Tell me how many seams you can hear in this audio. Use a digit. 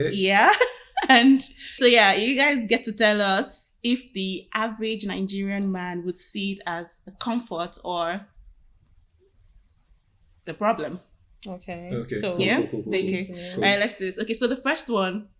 1